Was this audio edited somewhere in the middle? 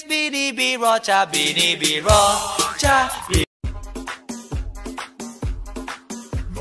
no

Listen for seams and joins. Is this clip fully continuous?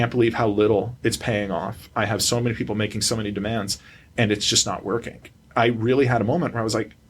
no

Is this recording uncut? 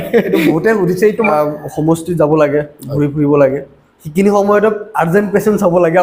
no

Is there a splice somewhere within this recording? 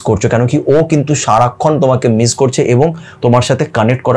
no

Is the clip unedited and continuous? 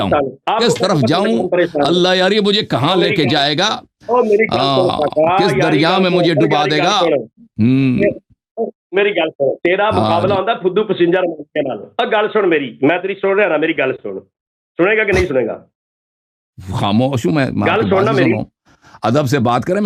yes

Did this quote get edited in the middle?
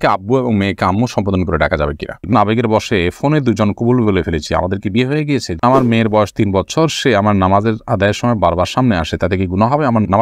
yes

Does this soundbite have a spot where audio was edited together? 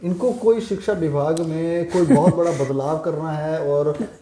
no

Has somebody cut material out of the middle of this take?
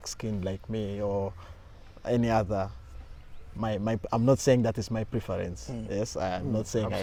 no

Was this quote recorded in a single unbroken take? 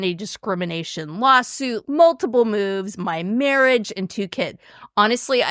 no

